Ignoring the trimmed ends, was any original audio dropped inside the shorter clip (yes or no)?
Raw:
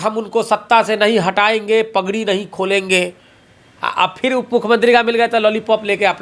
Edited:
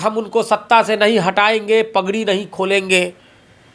no